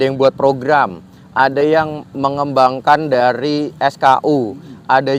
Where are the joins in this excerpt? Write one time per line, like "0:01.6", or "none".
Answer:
none